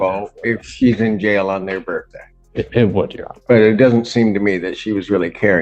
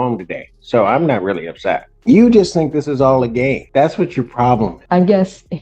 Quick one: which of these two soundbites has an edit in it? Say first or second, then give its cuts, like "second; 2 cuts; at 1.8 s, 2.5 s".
second; 3 cuts; at 1.9 s, 3.6 s, 4.8 s